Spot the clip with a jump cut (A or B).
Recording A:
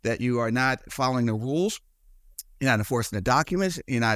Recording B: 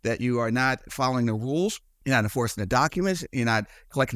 B